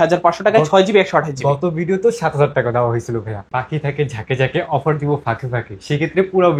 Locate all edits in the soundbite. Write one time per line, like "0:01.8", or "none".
0:03.4